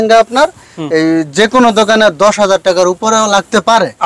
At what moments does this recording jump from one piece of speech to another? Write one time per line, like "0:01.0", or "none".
none